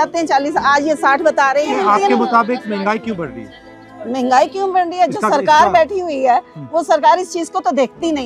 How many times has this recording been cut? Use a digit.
0